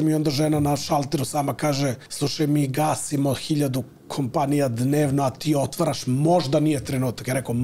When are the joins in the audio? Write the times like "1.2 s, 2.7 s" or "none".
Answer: 2.1 s